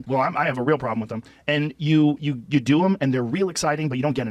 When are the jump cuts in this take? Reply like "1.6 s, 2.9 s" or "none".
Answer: none